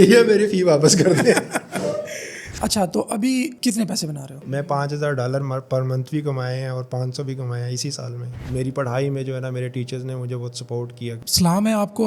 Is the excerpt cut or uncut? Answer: cut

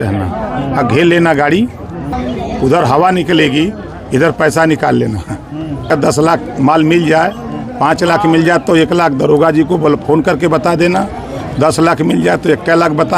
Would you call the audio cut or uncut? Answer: cut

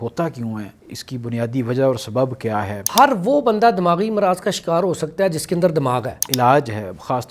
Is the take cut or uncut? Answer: cut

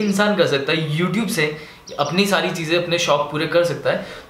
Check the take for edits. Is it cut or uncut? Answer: uncut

